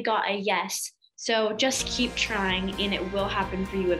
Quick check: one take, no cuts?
yes; 0 cuts

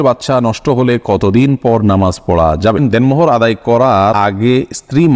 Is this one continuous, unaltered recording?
no; 2 cuts; at 2.8 s, 4.1 s

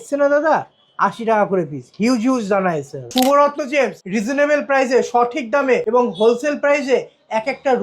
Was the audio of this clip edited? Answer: yes; 3 cuts; at 3.1 s, 4.0 s, 5.8 s

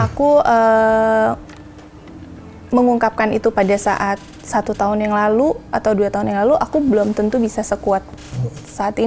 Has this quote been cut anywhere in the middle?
no; 0 cuts

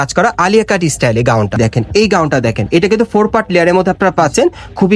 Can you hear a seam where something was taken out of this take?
yes; 1 cut; at 1.6 s

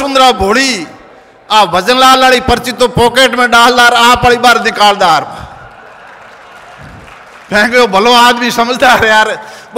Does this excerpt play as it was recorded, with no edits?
yes; 0 cuts

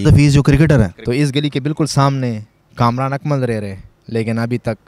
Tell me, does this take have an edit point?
yes; 1 cut; at 1.0 s

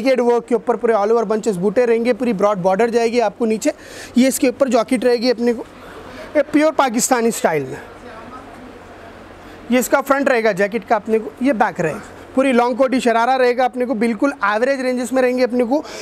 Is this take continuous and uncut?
yes; 0 cuts

